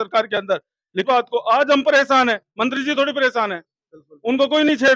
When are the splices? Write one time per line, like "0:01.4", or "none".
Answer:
0:01.0